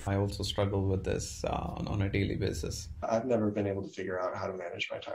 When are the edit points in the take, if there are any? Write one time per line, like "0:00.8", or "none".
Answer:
0:03.0